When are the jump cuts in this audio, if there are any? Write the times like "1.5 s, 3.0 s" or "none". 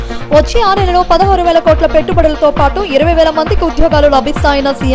none